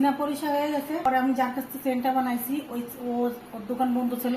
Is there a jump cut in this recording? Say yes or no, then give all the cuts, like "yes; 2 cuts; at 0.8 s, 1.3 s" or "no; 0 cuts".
yes; 1 cut; at 1.1 s